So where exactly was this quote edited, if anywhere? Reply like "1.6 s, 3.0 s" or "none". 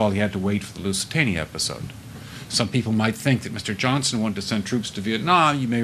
2.3 s